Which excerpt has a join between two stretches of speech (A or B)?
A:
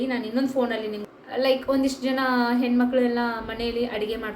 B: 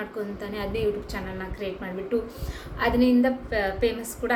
A